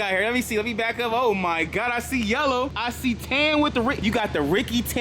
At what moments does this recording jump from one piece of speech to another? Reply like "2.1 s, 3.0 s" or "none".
2.8 s, 4.0 s